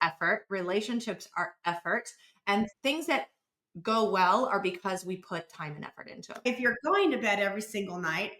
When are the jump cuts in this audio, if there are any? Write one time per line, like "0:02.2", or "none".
0:02.7
0:06.4